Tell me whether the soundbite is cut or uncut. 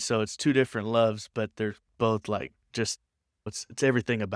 uncut